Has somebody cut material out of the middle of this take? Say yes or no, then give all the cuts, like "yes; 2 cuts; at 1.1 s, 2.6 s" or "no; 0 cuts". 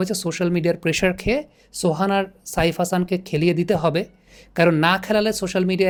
no; 0 cuts